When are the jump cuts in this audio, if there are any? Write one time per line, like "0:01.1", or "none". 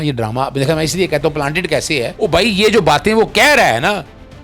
0:02.1